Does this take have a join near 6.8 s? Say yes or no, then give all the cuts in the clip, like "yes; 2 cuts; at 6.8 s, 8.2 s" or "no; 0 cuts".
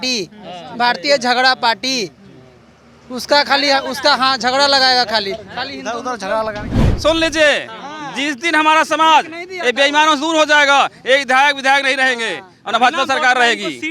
yes; 1 cut; at 6.8 s